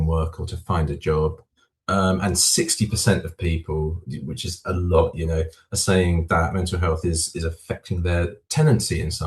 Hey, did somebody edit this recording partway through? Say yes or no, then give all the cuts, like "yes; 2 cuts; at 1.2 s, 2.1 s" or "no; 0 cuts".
yes; 1 cut; at 8.4 s